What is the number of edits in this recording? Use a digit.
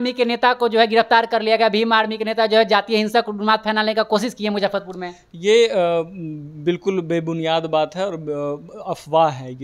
0